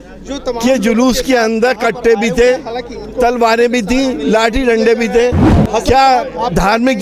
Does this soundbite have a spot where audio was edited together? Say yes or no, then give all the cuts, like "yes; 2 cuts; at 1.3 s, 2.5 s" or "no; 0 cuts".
no; 0 cuts